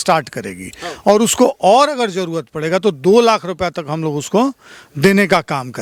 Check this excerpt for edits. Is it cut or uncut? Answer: uncut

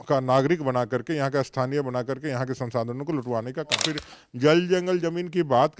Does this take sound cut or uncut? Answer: cut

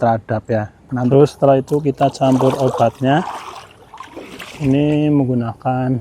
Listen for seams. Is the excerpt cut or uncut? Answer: cut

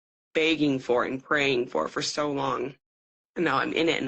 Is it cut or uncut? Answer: uncut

